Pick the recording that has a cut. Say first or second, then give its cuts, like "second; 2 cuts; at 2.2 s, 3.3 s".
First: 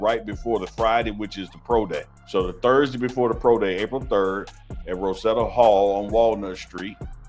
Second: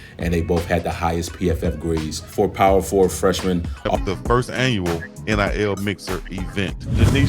second; 1 cut; at 3.9 s